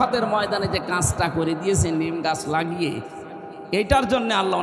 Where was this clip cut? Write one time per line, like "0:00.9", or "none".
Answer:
none